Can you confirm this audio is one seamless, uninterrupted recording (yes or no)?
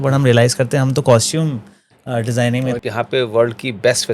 no